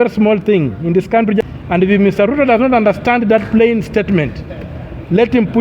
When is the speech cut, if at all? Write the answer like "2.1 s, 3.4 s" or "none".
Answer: 1.4 s

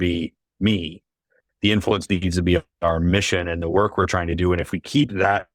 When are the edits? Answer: none

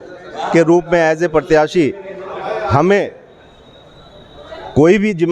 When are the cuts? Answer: none

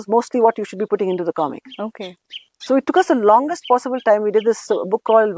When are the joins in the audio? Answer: none

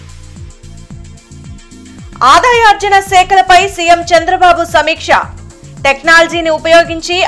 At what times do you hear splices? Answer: 1.9 s

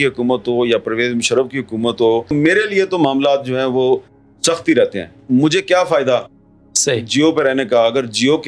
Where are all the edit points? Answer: none

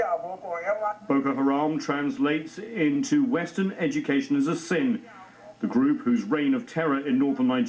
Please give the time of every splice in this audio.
0.9 s

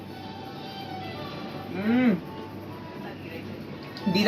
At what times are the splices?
none

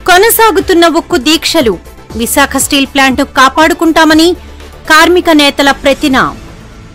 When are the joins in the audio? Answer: none

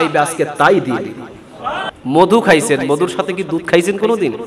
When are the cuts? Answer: 1.9 s

